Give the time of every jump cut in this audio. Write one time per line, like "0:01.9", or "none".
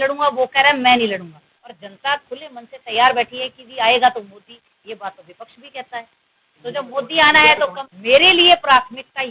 0:01.8
0:07.9